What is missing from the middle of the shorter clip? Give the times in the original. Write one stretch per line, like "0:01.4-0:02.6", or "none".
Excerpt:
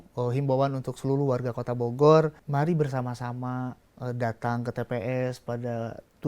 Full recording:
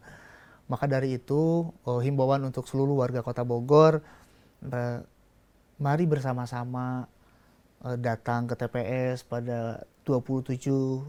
0:04.1-0:05.7
0:07.2-0:07.7